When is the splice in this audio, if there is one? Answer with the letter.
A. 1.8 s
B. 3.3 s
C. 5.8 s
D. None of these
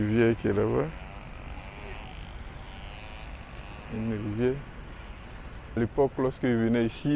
C